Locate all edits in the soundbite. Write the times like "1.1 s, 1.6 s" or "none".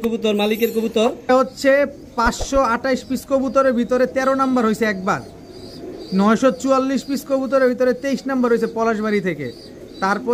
1.3 s